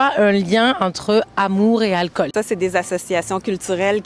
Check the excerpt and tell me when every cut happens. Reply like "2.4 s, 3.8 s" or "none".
2.3 s